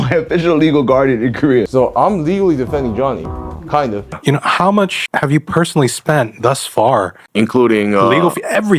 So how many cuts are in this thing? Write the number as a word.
two